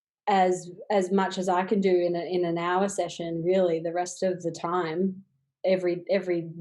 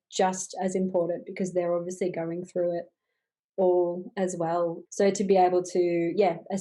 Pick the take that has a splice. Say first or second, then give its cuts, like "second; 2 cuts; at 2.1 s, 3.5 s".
second; 1 cut; at 4.8 s